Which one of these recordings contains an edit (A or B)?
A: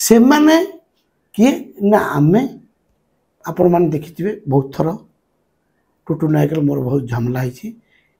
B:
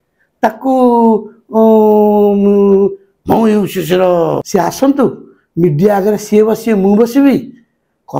B